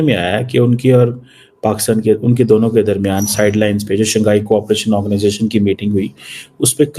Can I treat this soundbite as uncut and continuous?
yes; 0 cuts

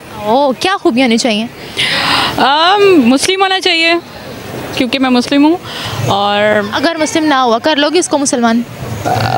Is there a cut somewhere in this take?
no; 0 cuts

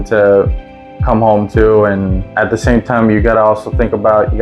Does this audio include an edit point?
yes; 1 cut; at 2.3 s

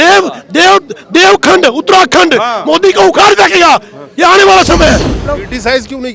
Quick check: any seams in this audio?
yes; 1 cut; at 5.2 s

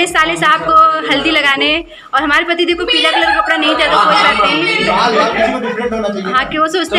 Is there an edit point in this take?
no; 0 cuts

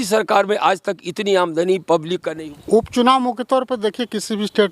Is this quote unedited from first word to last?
no; 1 cut; at 2.3 s

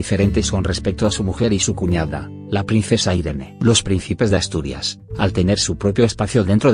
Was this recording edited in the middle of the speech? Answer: yes; 1 cut; at 5.3 s

